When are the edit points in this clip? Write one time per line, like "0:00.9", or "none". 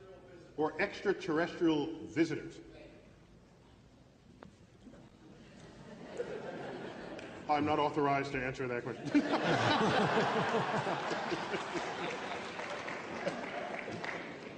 0:09.0